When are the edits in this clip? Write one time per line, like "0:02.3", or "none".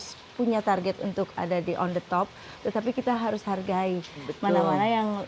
none